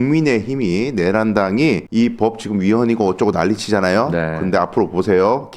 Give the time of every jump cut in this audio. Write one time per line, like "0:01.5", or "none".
0:01.8

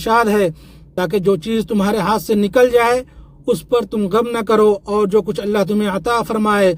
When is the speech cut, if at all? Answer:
none

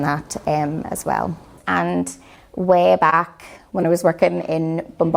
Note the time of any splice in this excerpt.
0:01.5

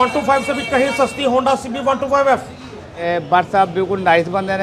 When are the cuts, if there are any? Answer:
0:03.0

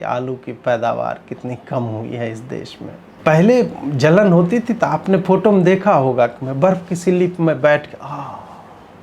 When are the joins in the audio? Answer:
0:03.0

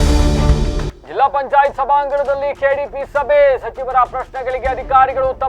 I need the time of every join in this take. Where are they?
0:00.9

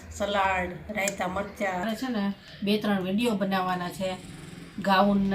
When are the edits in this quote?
0:01.9

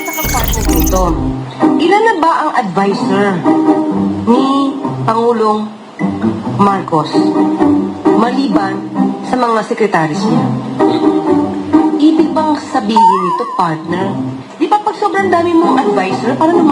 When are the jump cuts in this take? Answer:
none

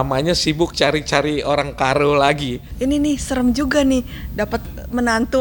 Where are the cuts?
0:02.6

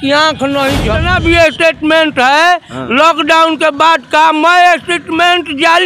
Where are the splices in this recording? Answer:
0:01.0

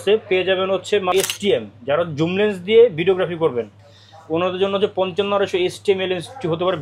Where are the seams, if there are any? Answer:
0:01.1

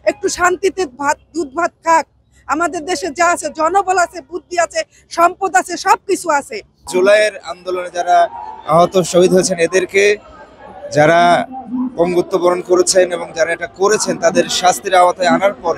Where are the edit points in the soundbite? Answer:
0:06.9

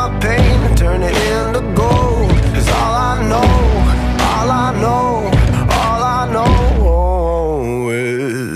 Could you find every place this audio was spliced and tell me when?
none

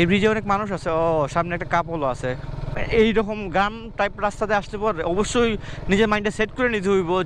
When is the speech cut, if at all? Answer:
0:02.7

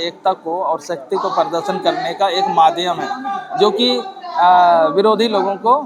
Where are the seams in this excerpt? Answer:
none

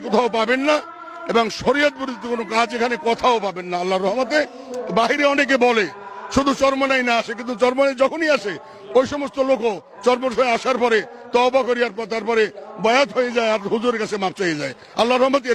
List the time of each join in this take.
none

